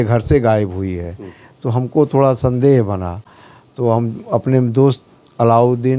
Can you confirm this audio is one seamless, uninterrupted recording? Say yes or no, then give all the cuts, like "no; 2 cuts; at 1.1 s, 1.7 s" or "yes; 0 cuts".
yes; 0 cuts